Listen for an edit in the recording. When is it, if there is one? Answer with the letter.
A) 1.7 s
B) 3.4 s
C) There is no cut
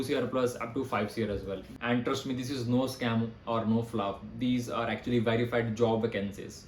A